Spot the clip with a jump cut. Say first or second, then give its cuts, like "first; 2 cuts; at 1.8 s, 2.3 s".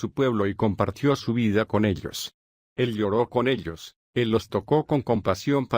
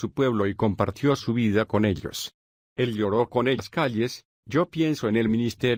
first; 1 cut; at 3.7 s